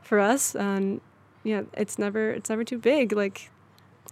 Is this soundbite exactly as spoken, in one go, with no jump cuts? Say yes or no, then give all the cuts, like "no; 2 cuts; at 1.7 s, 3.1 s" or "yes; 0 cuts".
yes; 0 cuts